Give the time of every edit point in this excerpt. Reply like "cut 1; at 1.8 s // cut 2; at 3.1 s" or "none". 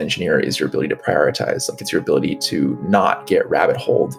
none